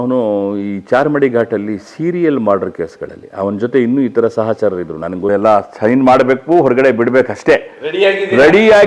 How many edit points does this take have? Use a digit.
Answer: 1